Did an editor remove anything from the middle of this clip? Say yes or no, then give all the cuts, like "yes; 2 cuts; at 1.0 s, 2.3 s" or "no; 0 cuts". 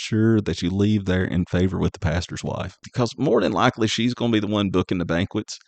yes; 1 cut; at 2.9 s